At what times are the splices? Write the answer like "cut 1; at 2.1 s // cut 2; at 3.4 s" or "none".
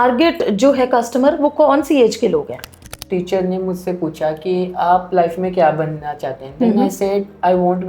cut 1; at 3.0 s